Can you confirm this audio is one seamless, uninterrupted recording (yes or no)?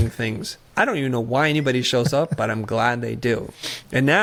yes